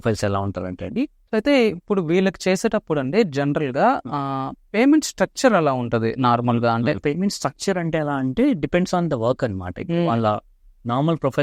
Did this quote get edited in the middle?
yes; 2 cuts; at 1.2 s, 7.0 s

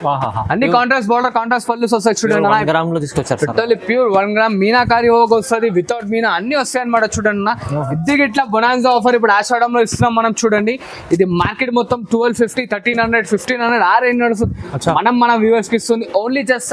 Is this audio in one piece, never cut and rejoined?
yes; 0 cuts

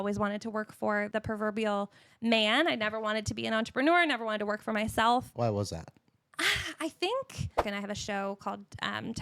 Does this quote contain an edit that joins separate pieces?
yes; 3 cuts; at 1.1 s, 5.4 s, 7.6 s

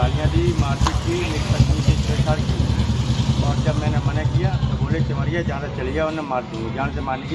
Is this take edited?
no; 0 cuts

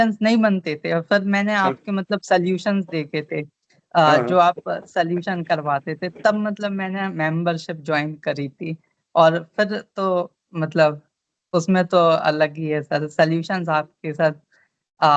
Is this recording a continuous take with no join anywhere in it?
yes; 0 cuts

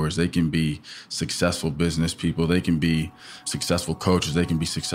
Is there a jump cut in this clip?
yes; 1 cut; at 3.5 s

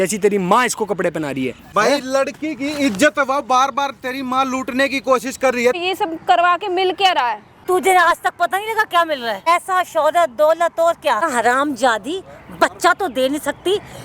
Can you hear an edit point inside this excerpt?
yes; 5 cuts; at 1.6 s, 5.8 s, 7.6 s, 9.5 s, 11.3 s

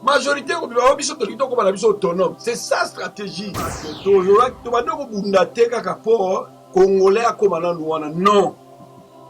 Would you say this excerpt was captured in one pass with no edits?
no; 1 cut; at 3.9 s

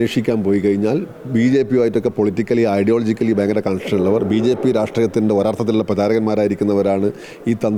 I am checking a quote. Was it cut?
no; 0 cuts

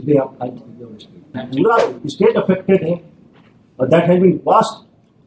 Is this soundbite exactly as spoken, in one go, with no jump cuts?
no; 1 cut; at 1.4 s

